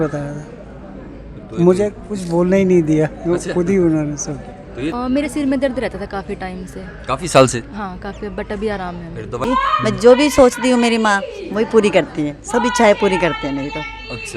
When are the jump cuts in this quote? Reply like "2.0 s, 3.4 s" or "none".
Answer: 4.9 s, 9.4 s